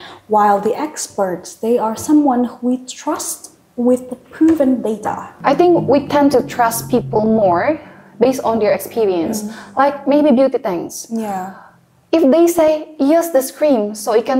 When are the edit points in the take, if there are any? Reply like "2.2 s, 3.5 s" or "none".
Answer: 5.2 s